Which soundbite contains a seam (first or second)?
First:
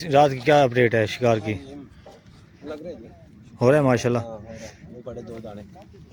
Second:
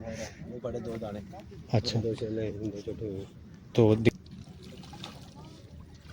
second